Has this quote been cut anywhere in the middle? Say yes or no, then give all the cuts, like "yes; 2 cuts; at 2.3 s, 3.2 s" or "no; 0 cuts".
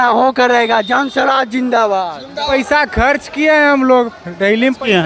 yes; 1 cut; at 2.5 s